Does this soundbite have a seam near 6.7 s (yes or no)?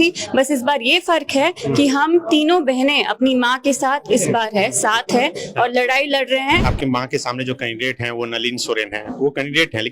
yes